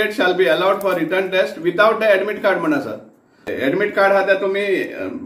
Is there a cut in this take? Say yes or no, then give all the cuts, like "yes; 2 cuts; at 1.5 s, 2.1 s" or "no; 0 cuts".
yes; 1 cut; at 3.5 s